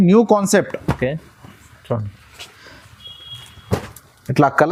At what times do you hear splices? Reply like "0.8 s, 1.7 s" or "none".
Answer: none